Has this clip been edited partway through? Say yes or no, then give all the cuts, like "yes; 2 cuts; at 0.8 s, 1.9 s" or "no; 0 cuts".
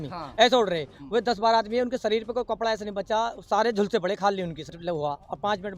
yes; 1 cut; at 4.7 s